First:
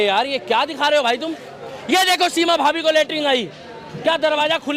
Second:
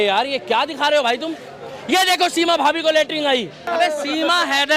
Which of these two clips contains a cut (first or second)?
second